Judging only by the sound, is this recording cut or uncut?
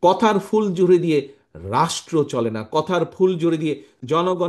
uncut